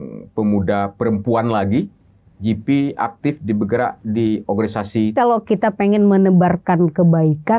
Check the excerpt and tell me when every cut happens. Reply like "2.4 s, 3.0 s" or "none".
5.1 s